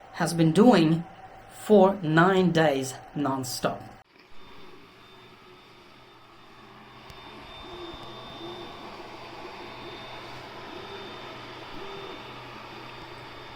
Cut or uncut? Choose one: uncut